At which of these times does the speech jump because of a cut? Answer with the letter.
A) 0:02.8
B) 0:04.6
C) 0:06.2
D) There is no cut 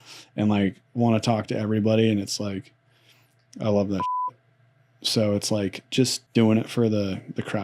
C